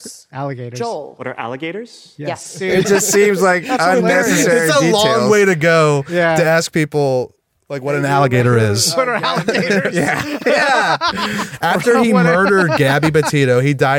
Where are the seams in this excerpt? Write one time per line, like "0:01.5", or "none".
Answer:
0:02.6
0:11.5